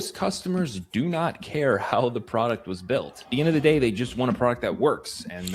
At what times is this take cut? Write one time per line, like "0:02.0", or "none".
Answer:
none